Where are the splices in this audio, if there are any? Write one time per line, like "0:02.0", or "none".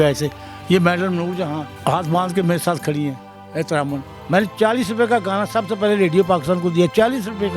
0:04.0